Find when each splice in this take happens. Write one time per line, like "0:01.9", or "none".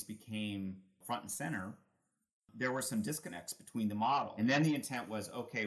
0:01.0
0:02.5
0:04.3